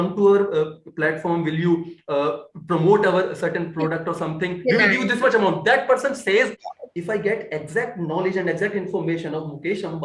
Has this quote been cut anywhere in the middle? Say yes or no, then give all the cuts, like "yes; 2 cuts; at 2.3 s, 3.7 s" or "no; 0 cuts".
yes; 1 cut; at 6.7 s